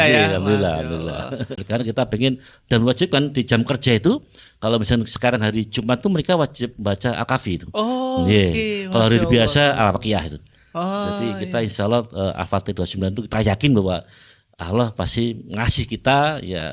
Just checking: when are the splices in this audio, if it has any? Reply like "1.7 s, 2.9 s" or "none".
1.5 s